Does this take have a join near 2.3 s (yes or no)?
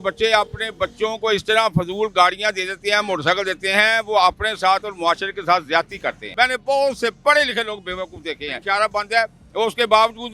no